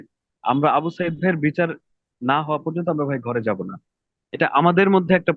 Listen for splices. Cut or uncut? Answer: uncut